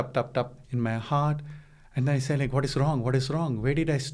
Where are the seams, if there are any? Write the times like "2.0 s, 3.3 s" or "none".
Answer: none